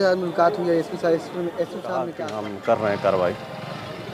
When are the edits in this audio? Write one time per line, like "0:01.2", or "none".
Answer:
0:02.3